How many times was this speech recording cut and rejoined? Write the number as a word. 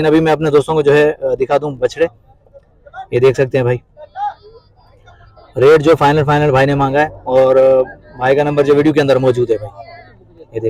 zero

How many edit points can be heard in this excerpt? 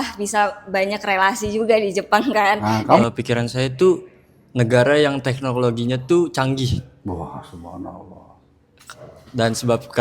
one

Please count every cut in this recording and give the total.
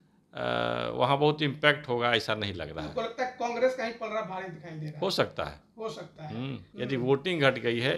one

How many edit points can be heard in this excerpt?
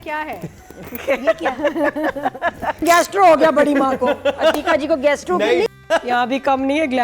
two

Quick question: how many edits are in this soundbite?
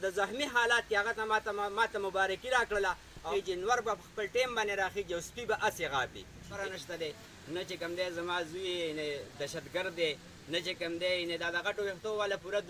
two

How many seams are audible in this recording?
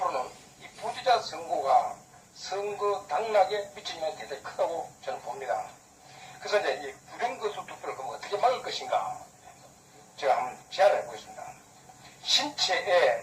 one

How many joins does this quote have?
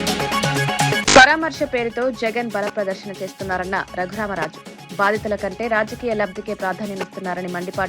one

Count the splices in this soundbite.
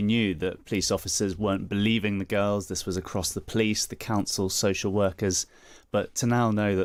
zero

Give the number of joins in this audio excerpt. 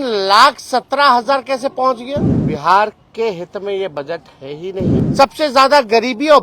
two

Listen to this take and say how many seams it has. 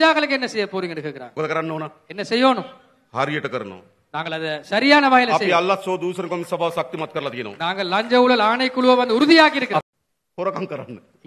two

